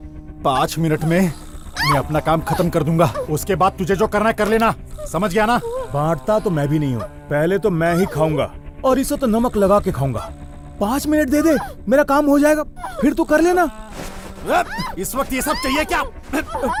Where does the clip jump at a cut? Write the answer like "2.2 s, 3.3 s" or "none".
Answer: none

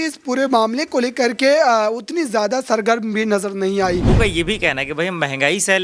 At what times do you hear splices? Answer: 4.1 s

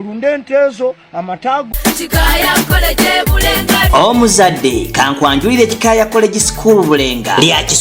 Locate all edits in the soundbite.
1.7 s

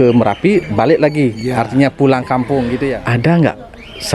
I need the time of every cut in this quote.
3.0 s

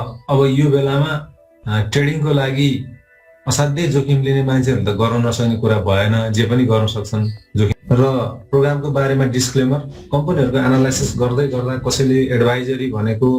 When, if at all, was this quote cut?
7.7 s

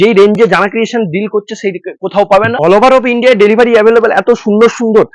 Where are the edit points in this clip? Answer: 2.5 s

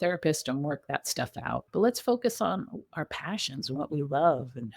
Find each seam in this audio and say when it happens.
1.6 s

